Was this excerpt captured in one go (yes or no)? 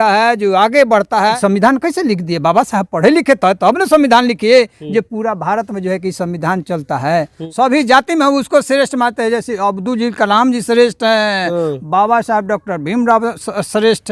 yes